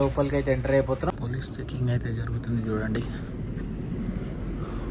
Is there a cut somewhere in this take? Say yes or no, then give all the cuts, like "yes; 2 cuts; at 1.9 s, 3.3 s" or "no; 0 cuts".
yes; 1 cut; at 1.1 s